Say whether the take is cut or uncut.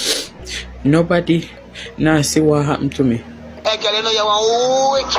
cut